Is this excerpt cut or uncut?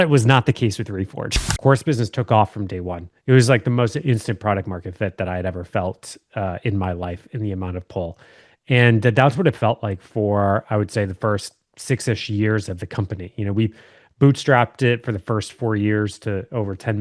cut